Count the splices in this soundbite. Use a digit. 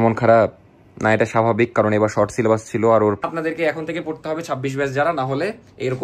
1